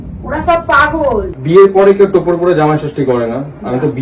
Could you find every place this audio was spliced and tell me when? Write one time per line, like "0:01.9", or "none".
0:01.3